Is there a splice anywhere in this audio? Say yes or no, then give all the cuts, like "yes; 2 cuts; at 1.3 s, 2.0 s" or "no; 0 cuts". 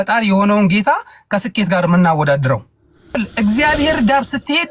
yes; 1 cut; at 3.2 s